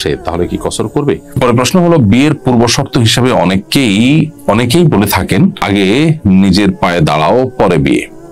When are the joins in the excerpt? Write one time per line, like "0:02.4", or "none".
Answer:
0:01.3
0:05.6